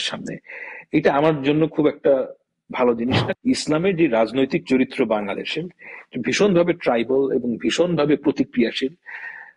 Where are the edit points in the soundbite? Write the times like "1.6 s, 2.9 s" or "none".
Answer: 3.2 s